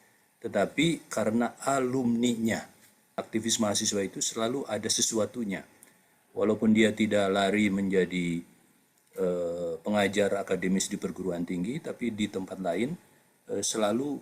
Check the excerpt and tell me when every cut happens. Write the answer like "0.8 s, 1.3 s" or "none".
3.2 s